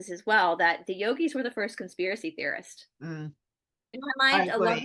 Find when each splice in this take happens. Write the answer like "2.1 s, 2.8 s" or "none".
3.9 s